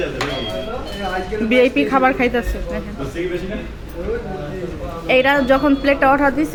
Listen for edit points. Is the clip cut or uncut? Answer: uncut